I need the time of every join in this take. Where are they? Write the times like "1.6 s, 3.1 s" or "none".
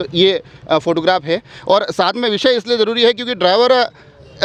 none